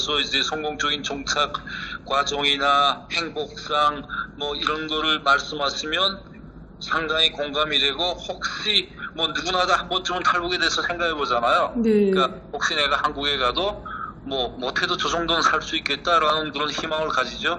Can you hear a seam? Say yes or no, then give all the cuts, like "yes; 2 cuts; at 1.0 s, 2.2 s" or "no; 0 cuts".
no; 0 cuts